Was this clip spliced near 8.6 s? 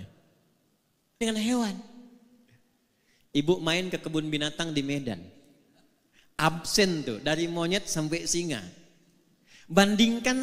no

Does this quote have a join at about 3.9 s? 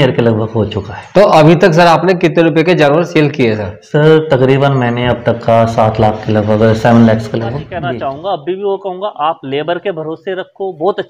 no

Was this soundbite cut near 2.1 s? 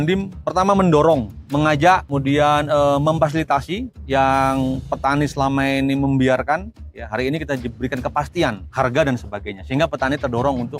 yes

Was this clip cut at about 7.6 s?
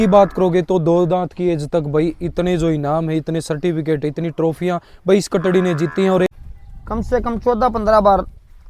no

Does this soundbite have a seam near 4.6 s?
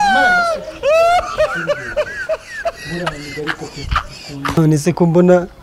yes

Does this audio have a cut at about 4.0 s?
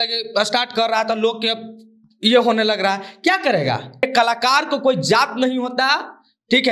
yes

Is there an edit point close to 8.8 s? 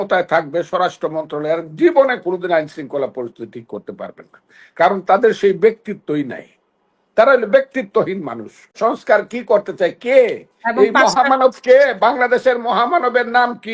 yes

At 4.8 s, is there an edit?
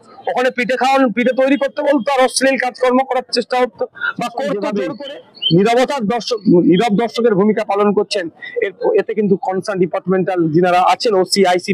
yes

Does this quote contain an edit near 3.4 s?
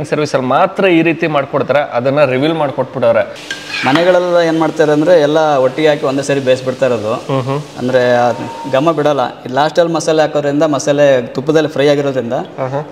yes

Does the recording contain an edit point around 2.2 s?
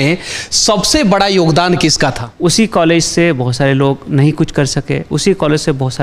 yes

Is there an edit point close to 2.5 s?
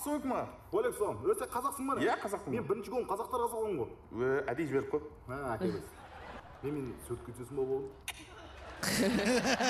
no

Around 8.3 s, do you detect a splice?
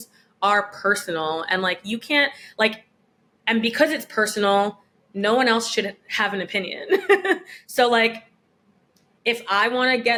no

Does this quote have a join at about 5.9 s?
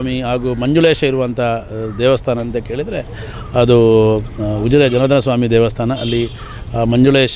no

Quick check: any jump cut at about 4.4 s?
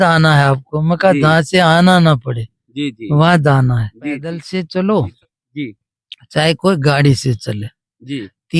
yes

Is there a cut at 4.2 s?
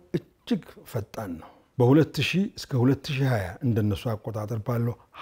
no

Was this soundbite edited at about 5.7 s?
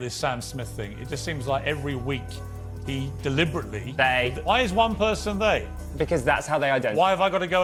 no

